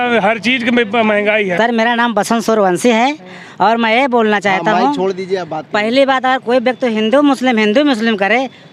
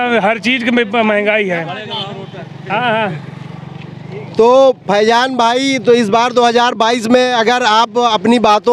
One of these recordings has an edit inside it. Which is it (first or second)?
first